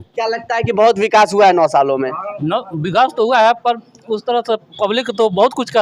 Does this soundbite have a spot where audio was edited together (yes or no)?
no